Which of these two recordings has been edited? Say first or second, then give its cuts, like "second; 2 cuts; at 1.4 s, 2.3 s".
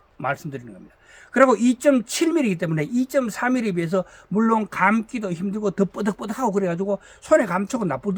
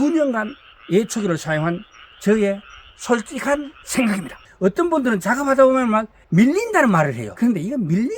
second; 3 cuts; at 4.4 s, 6.2 s, 7.2 s